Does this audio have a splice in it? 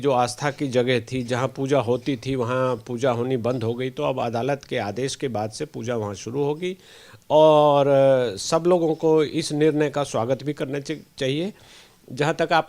no; 0 cuts

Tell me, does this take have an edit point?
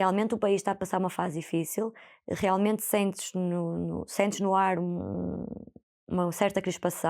no; 0 cuts

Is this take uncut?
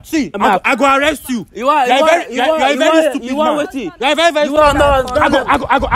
no; 1 cut; at 4.5 s

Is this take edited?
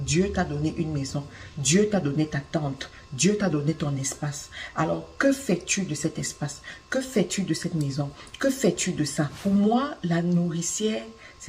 yes; 1 cut; at 9.3 s

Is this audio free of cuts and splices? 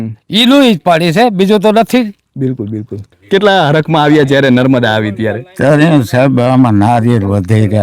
no; 1 cut; at 3.1 s

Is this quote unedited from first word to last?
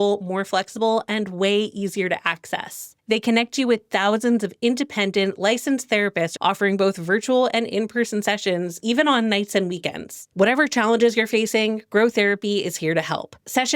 no; 3 cuts; at 2.9 s, 6.3 s, 10.2 s

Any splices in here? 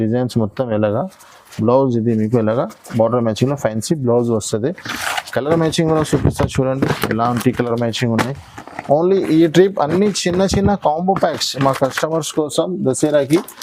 no; 0 cuts

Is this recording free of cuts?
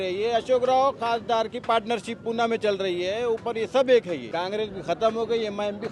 no; 1 cut; at 4.3 s

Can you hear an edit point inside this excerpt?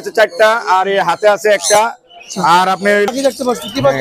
yes; 1 cut; at 3.1 s

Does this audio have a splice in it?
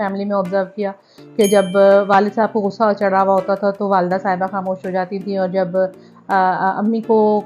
no; 0 cuts

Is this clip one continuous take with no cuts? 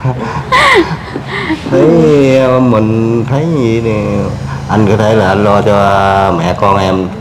yes; 0 cuts

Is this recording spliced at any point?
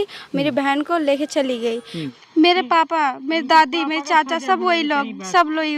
yes; 1 cut; at 2.0 s

